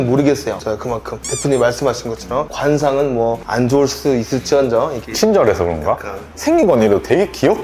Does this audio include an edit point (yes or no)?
no